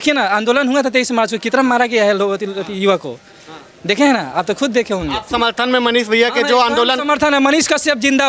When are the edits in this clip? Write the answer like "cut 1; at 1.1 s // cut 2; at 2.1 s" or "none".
none